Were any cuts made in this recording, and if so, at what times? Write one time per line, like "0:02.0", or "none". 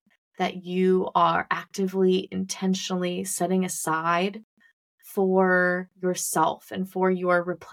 none